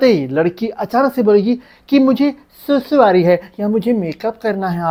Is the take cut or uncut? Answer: uncut